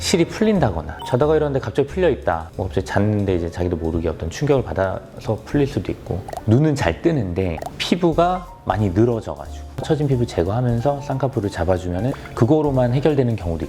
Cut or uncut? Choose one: cut